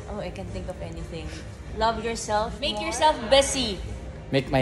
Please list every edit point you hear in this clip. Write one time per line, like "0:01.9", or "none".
0:02.8